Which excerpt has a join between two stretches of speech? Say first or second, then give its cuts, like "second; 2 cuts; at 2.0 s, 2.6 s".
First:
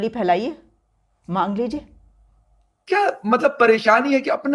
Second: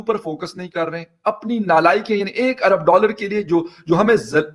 first; 1 cut; at 2.3 s